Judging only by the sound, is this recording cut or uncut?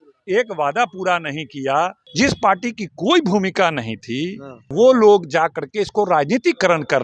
cut